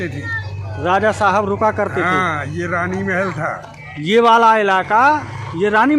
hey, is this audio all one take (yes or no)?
yes